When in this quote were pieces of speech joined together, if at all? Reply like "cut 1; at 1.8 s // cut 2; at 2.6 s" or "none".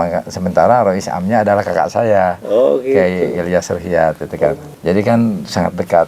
cut 1; at 4.7 s